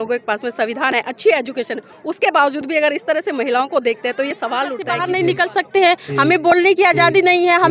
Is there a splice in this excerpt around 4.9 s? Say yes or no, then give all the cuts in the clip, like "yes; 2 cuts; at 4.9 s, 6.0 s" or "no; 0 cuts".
yes; 1 cut; at 4.9 s